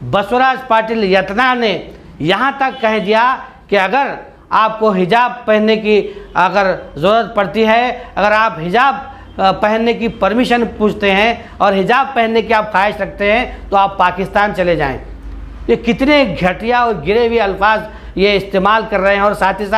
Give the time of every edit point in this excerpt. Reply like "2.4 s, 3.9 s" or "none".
none